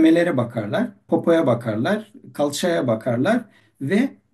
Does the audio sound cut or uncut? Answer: cut